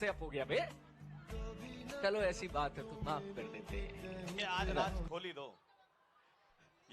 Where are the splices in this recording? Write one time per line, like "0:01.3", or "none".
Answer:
0:05.2